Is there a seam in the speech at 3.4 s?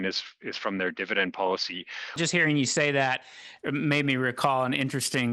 no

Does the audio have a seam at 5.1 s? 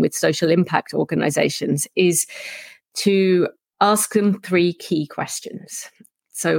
no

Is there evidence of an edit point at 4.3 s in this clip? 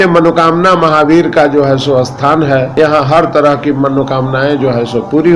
no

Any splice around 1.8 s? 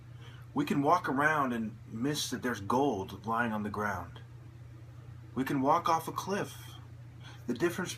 no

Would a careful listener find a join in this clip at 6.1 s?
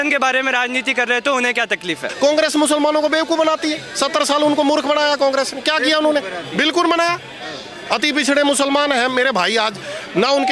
no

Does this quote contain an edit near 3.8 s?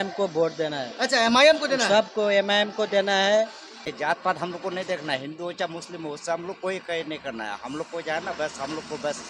yes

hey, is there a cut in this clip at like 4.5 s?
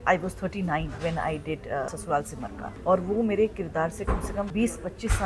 yes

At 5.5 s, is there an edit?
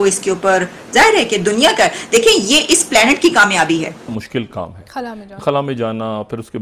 no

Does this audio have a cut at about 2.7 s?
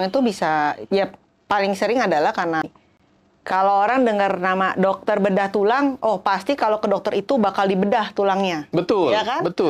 yes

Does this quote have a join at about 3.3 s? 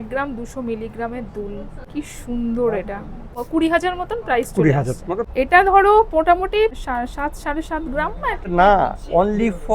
yes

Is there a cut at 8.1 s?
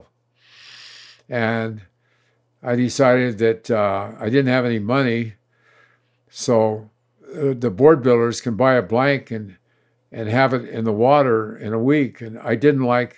no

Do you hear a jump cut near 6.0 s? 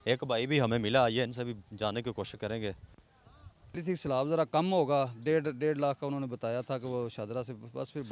no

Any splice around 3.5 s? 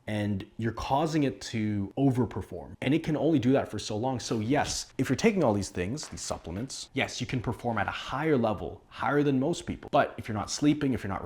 no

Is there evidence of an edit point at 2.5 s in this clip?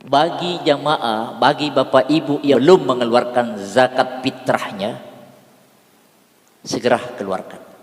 yes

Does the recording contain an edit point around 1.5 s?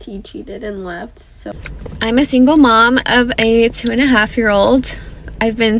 yes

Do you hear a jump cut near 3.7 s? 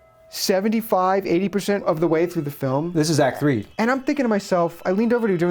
yes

